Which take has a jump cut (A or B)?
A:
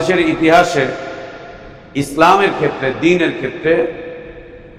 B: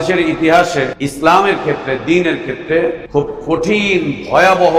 B